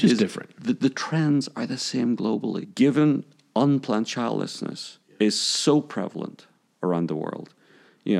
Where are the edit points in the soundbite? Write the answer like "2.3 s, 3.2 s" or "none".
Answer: 2.7 s